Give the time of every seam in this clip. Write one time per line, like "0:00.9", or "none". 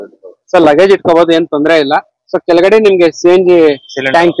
none